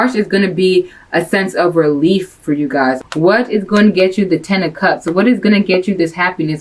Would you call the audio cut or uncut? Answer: cut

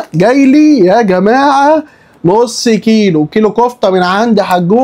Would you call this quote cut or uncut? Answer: uncut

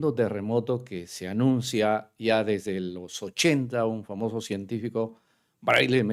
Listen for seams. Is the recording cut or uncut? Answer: uncut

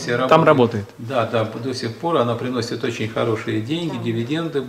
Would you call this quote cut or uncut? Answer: uncut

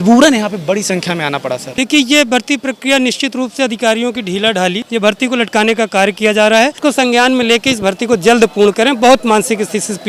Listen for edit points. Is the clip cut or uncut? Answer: cut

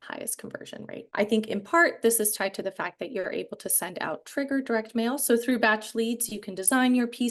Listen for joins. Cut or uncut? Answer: cut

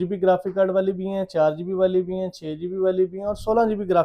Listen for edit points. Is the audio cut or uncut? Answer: uncut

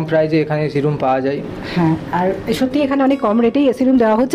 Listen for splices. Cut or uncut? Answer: uncut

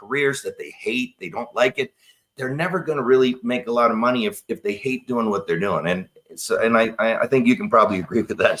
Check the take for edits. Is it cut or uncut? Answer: uncut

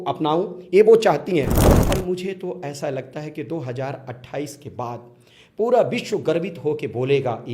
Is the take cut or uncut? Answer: cut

